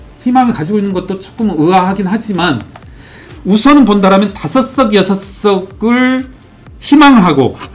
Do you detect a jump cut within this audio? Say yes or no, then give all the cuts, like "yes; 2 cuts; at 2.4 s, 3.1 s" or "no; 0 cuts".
no; 0 cuts